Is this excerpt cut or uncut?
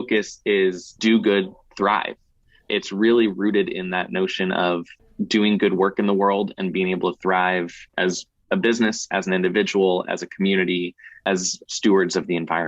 cut